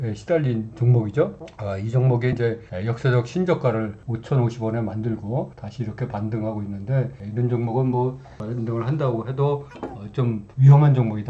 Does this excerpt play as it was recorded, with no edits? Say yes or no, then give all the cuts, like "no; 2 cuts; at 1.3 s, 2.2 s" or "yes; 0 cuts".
no; 2 cuts; at 8.3 s, 10.5 s